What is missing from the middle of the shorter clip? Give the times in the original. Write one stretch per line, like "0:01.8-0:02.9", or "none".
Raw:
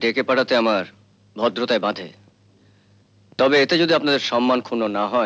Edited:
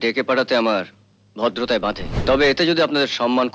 0:02.1-0:03.2